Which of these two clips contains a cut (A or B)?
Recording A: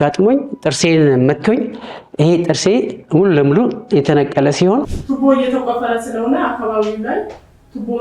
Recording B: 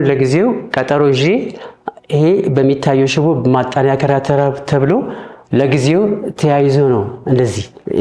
A